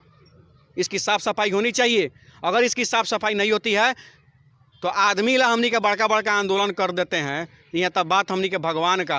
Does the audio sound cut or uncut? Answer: uncut